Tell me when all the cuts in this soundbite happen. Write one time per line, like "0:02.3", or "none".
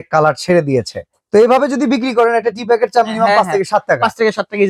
none